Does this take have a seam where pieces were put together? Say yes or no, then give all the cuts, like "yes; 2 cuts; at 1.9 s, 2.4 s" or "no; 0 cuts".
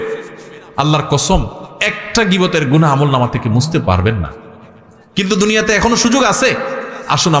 no; 0 cuts